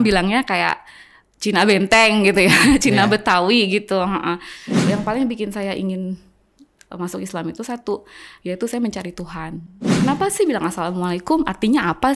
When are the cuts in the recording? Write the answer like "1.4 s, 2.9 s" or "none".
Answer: 4.8 s, 9.8 s